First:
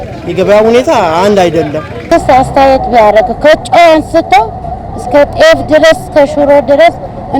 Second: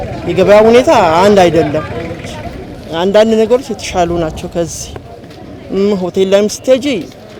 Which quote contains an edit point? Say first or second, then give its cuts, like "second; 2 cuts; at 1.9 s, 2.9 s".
first; 1 cut; at 2.1 s